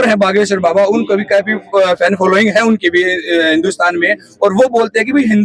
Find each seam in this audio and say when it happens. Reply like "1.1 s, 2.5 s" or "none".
none